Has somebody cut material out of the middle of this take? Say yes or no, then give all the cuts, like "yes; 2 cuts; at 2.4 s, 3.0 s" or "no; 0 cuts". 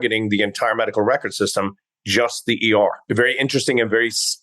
yes; 1 cut; at 3.0 s